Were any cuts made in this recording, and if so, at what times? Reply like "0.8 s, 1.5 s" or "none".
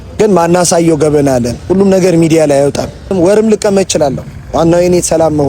3.1 s